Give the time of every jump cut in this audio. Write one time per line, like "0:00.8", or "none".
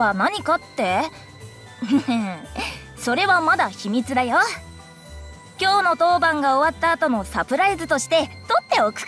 none